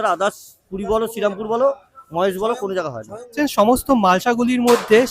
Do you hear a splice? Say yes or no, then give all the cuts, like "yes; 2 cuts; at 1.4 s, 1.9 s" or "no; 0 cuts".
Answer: yes; 1 cut; at 3.3 s